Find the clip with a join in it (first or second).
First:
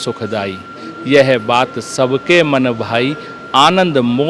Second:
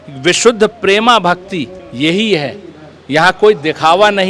second